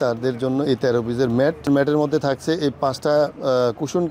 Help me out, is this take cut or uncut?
cut